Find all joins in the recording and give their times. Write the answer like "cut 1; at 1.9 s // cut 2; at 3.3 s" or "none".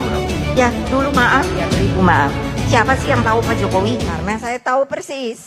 cut 1; at 4.1 s

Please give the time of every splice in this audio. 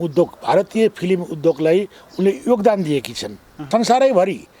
cut 1; at 3.7 s

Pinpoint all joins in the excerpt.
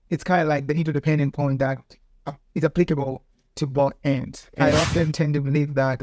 cut 1; at 4.7 s

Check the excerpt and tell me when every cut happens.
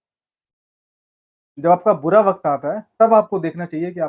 none

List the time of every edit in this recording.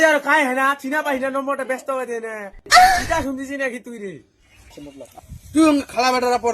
cut 1; at 4.8 s

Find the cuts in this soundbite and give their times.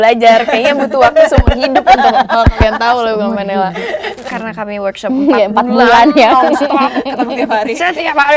cut 1; at 4.3 s

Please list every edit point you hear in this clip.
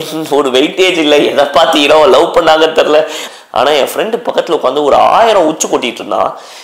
cut 1; at 3.2 s

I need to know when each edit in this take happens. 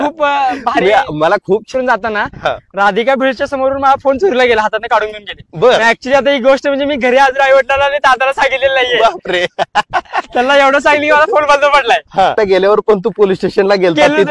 cut 1; at 1.7 s // cut 2; at 12.4 s

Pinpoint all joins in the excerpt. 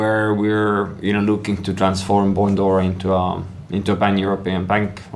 none

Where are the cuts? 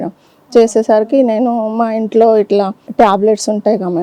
cut 1; at 2.8 s

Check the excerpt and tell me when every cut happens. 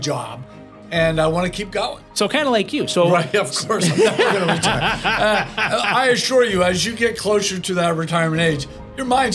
none

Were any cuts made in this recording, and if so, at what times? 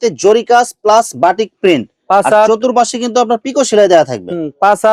none

